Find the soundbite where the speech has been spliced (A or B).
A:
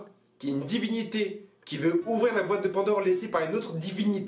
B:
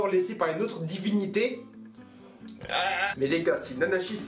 B